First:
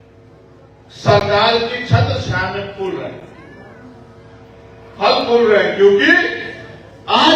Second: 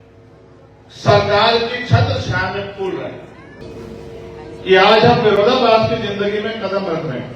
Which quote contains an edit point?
second; 1 cut; at 3.6 s

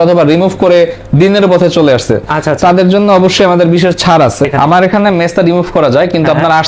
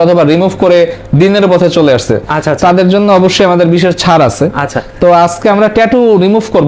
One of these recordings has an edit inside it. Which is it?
first; 1 cut; at 4.5 s

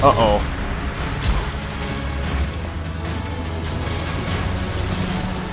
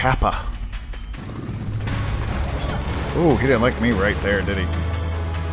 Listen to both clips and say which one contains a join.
second; 1 cut; at 1.2 s

